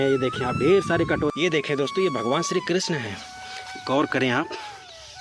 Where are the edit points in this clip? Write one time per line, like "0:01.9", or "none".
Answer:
0:01.3